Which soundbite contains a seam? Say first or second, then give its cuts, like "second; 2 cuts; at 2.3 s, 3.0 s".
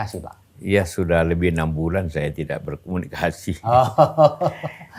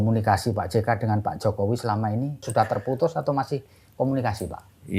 second; 1 cut; at 2.5 s